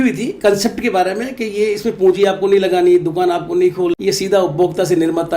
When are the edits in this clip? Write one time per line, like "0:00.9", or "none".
0:03.9